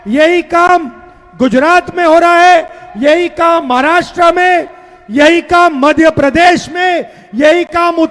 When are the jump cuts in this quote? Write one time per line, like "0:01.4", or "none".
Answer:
none